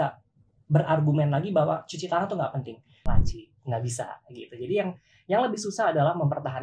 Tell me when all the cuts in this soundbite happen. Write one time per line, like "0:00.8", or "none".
0:03.1